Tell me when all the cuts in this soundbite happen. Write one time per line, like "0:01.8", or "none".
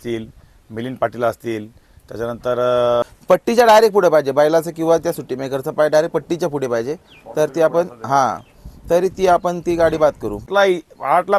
0:03.0
0:10.5